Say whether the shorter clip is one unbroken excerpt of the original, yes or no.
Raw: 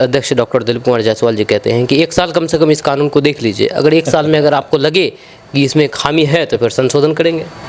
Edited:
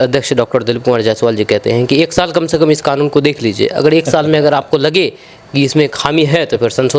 yes